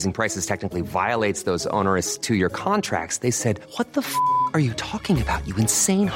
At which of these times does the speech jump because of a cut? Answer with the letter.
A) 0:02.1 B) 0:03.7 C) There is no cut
C